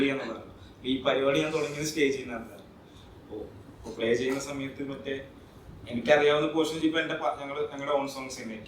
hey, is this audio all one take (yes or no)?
yes